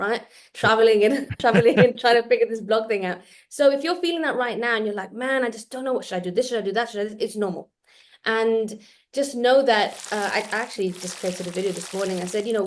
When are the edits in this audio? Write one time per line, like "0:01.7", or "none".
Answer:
0:01.3